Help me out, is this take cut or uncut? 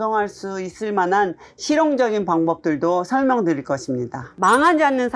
cut